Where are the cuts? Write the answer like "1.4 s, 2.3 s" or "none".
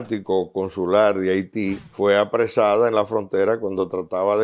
1.8 s